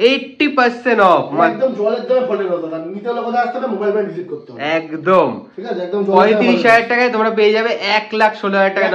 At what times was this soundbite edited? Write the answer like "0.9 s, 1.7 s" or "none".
none